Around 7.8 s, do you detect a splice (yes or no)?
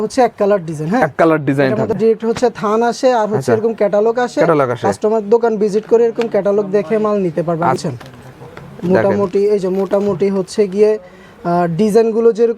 yes